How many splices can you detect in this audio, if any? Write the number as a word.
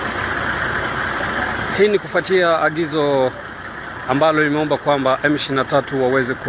one